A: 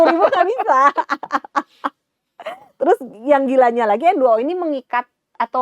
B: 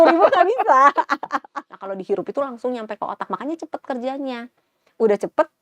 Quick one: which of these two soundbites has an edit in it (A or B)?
B